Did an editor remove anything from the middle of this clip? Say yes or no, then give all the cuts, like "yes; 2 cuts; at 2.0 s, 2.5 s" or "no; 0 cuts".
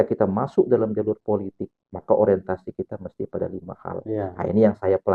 no; 0 cuts